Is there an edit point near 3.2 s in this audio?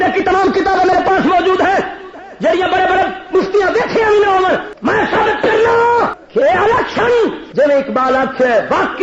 no; 3 cuts; at 4.7 s, 6.2 s, 7.4 s

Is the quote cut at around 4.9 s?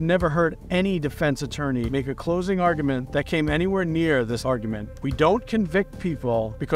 yes; 1 cut; at 4.9 s

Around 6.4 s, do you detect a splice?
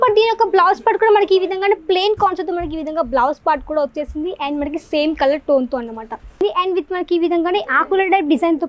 yes; 1 cut; at 6.4 s

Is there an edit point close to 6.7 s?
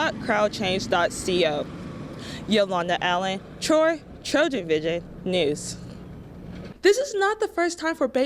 yes; 1 cut; at 6.7 s

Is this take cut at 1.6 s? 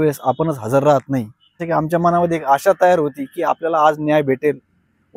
yes; 1 cut; at 1.6 s

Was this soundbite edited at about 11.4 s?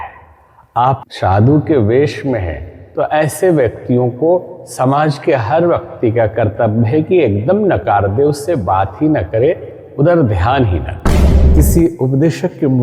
yes; 1 cut; at 11.4 s

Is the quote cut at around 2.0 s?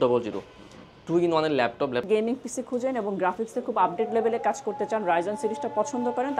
yes; 1 cut; at 2.0 s

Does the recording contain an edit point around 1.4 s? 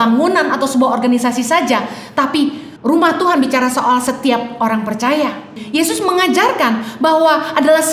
no; 2 cuts; at 2.7 s, 5.6 s

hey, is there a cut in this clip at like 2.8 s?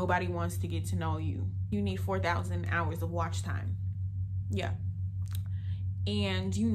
no; 1 cut; at 1.5 s

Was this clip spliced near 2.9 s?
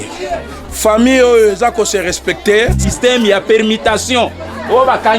yes; 1 cut; at 2.9 s

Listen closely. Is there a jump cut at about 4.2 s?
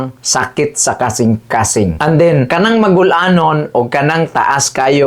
no; 1 cut; at 2.0 s

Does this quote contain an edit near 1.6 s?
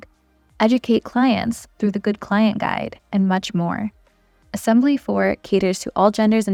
no; 0 cuts

